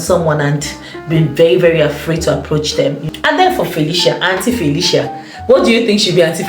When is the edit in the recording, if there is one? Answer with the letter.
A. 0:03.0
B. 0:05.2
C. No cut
A